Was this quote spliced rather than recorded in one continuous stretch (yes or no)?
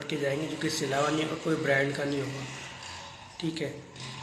no